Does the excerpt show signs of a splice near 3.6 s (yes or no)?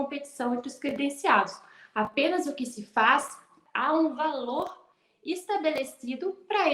yes